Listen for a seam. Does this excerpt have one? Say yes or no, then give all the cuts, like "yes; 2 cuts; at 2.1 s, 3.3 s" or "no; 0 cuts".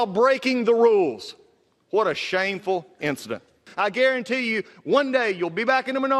yes; 1 cut; at 3.6 s